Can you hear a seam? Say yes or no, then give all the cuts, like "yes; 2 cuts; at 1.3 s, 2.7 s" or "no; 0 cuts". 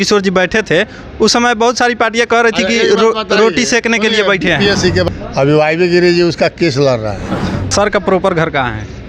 yes; 2 cuts; at 5.1 s, 7.7 s